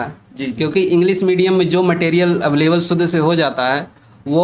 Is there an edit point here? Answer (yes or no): no